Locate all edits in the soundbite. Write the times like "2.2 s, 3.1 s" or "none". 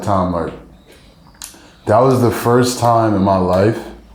none